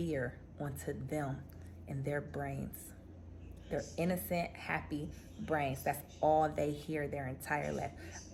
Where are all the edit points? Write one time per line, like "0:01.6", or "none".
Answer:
none